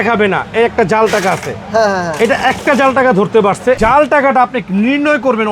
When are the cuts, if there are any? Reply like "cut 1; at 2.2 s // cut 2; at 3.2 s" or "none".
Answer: cut 1; at 3.8 s